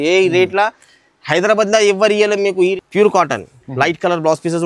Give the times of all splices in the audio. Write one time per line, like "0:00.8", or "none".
0:02.7